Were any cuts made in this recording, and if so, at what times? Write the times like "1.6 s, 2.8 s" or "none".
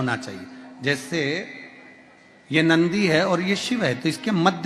none